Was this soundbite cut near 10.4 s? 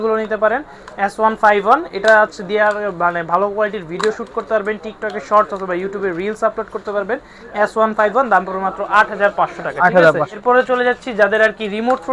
yes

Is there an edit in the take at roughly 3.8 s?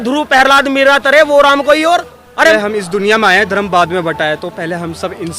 no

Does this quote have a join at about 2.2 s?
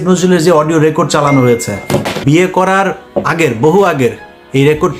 yes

